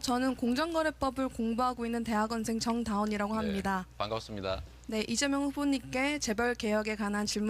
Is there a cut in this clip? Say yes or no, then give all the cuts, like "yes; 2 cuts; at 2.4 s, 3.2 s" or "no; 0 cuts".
no; 0 cuts